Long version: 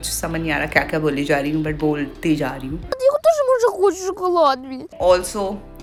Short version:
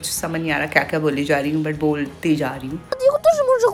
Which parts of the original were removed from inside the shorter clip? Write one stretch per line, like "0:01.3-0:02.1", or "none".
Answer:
none